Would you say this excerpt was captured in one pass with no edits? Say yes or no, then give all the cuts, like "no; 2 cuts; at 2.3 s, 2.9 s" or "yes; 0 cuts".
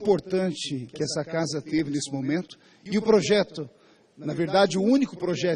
yes; 0 cuts